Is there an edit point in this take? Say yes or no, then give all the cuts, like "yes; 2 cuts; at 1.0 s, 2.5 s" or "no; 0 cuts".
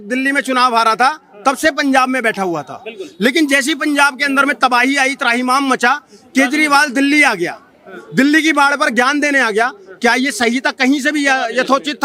no; 0 cuts